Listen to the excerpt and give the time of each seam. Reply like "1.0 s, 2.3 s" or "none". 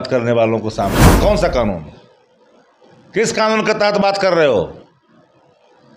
1.2 s